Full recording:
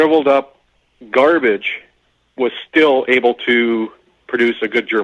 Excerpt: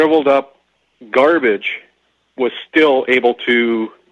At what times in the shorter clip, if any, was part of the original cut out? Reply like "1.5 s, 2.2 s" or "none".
none